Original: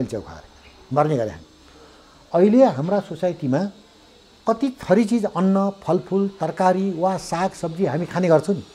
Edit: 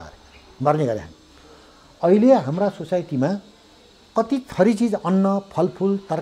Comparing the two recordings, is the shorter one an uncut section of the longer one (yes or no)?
yes